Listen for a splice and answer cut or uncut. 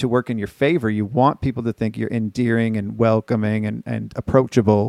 uncut